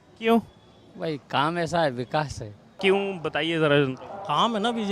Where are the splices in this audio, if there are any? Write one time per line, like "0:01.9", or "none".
0:02.7